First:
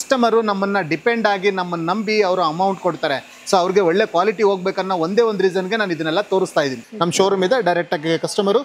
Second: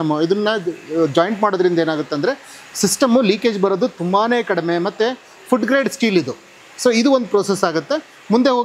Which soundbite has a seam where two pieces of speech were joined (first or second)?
first